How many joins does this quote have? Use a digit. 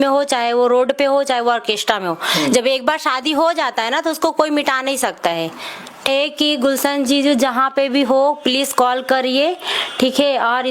1